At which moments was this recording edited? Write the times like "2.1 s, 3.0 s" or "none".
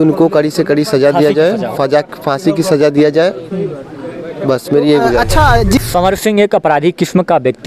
5.8 s